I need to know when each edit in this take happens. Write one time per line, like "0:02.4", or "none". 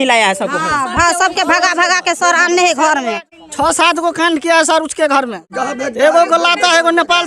0:03.3
0:05.4